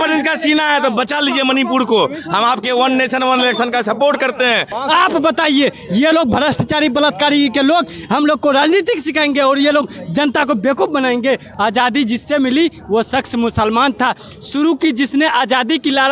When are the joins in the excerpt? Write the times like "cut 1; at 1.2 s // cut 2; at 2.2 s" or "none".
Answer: cut 1; at 4.8 s // cut 2; at 11.5 s